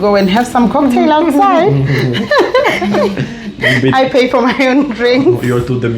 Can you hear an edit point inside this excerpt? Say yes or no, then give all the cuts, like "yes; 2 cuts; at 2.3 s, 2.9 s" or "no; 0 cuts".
yes; 1 cut; at 3.0 s